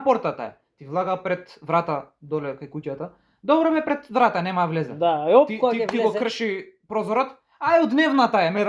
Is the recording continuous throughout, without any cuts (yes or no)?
yes